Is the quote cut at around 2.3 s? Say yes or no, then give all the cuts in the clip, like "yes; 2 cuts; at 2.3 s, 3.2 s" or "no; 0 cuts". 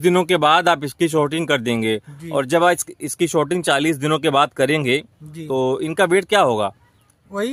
no; 0 cuts